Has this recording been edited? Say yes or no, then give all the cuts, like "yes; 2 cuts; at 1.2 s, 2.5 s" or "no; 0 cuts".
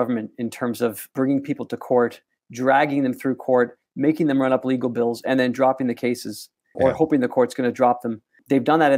no; 0 cuts